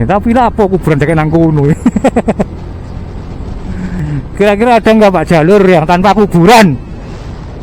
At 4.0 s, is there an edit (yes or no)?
yes